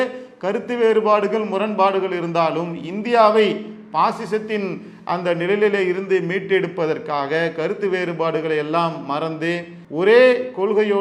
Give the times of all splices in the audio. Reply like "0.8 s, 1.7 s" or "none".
9.8 s